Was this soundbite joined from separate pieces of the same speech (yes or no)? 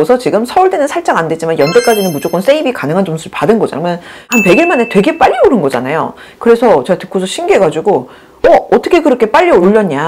yes